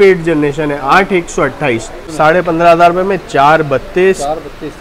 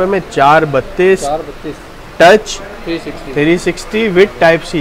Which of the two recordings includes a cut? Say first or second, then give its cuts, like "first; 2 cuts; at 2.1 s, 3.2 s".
first; 1 cut; at 2.0 s